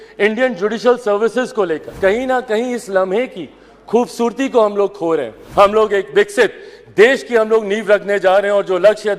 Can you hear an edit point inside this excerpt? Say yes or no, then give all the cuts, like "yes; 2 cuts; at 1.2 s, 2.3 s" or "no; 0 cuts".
yes; 2 cuts; at 1.8 s, 5.4 s